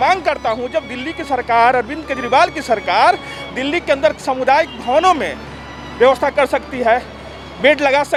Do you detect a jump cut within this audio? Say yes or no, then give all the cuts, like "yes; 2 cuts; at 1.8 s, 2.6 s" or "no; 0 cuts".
no; 0 cuts